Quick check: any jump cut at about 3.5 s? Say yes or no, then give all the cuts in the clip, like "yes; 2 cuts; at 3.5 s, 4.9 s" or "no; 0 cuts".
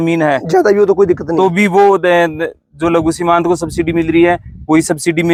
no; 0 cuts